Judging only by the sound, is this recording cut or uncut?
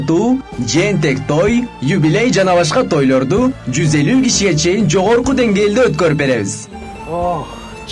uncut